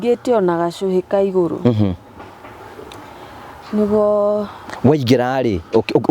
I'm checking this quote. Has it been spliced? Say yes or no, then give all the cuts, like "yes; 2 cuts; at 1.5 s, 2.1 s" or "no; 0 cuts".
no; 0 cuts